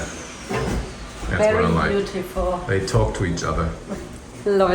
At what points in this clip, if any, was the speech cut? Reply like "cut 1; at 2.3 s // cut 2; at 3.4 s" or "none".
none